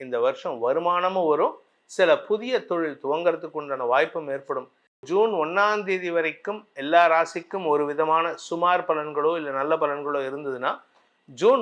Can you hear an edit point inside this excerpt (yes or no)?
yes